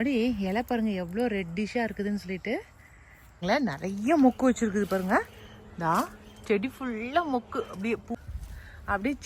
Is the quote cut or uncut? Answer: cut